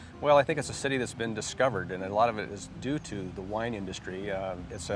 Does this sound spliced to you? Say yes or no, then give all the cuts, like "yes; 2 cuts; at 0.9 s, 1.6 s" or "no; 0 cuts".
no; 0 cuts